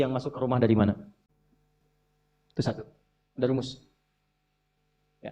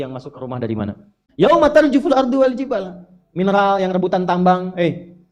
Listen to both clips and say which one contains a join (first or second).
second